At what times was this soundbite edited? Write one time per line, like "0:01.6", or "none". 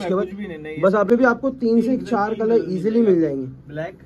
0:01.1